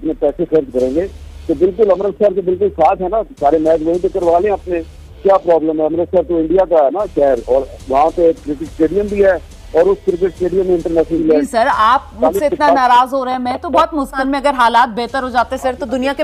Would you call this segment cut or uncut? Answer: cut